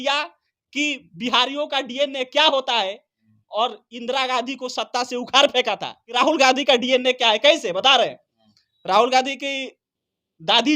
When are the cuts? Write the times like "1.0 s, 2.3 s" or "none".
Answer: 6.0 s